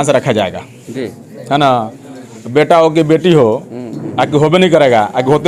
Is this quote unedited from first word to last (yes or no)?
yes